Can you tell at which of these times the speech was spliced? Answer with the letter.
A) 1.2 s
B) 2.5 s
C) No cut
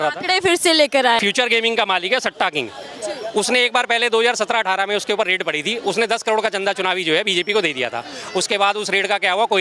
A